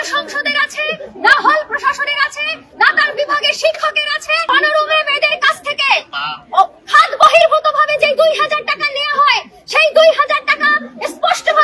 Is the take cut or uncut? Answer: cut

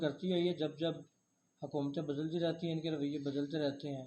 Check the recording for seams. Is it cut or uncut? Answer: uncut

